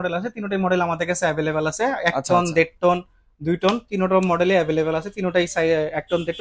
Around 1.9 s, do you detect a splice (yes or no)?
no